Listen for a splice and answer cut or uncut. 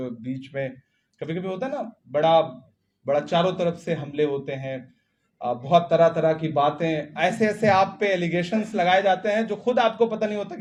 uncut